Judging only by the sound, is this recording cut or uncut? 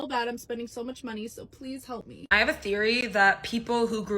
cut